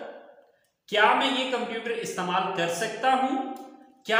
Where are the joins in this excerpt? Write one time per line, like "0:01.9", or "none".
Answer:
none